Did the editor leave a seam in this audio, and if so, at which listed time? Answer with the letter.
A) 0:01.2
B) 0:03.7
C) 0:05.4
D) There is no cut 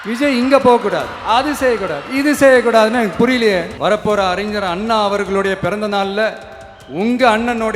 B